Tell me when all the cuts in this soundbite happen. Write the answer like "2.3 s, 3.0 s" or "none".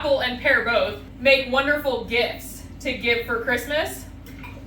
1.1 s